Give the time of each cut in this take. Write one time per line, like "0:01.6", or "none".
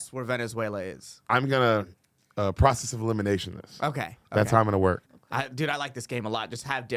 0:01.3
0:05.1